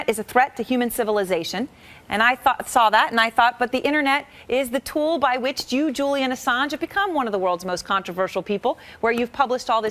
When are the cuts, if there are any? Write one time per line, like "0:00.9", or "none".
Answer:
none